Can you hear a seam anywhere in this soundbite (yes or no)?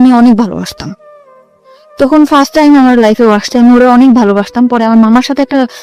no